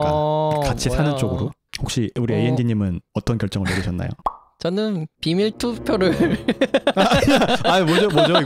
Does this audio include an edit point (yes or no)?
yes